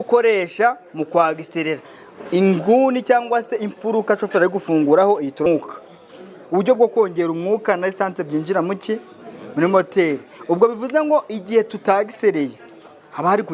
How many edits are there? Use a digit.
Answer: 1